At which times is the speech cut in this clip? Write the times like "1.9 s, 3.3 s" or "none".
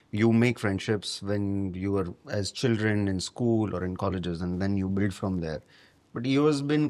none

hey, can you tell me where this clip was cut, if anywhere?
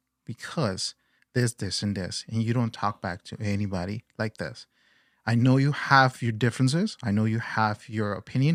none

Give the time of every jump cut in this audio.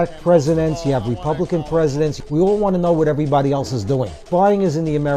2.2 s, 4.2 s

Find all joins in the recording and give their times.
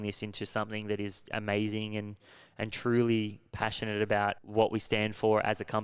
4.4 s

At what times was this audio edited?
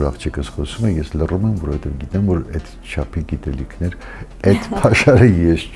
none

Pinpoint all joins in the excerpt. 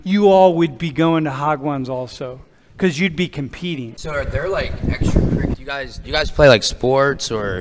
3.9 s, 5.6 s

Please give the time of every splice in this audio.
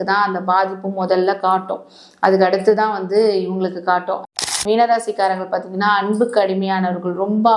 4.6 s

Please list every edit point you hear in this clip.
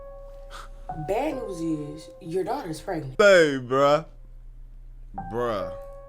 3.1 s

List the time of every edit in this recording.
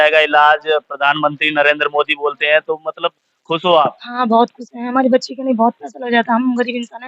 none

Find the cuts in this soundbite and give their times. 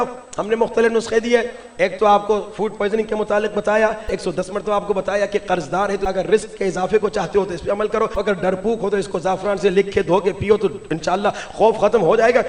4.1 s, 6.0 s, 8.2 s

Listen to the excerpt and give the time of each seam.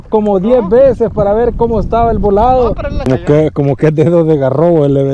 3.0 s

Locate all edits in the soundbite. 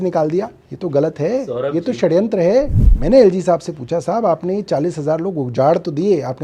2.7 s

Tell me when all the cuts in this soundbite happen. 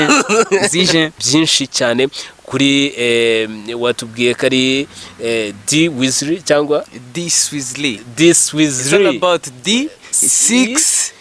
1.2 s

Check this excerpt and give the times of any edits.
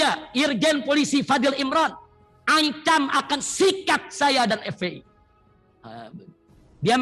none

